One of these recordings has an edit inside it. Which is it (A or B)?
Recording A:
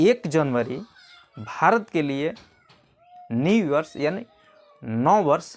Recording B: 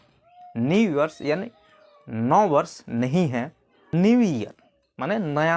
B